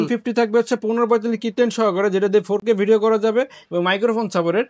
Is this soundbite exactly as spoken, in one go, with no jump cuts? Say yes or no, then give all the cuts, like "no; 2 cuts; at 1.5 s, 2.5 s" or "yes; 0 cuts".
yes; 0 cuts